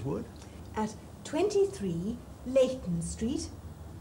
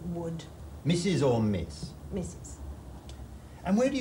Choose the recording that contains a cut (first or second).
second